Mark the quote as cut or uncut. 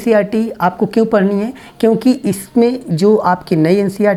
uncut